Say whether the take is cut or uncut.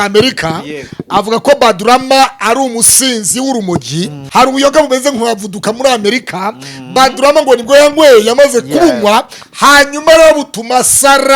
cut